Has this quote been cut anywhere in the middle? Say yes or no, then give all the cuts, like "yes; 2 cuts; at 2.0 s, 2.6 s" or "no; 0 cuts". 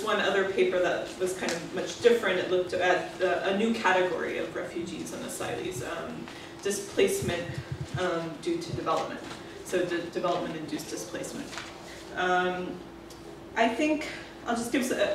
yes; 1 cut; at 7.4 s